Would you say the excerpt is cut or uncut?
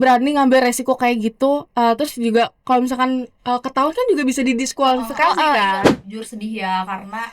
cut